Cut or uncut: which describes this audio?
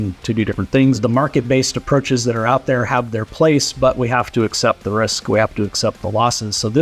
cut